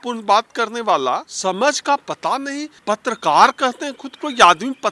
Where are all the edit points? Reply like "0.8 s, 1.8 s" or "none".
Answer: 1.3 s, 2.7 s